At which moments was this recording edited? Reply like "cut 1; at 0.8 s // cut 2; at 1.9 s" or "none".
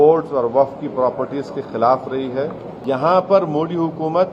cut 1; at 2.7 s